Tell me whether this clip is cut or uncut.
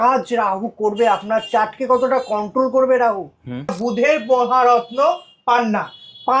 cut